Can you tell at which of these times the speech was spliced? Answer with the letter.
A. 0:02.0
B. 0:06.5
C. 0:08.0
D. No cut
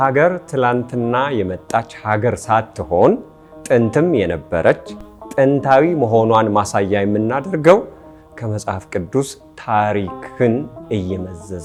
D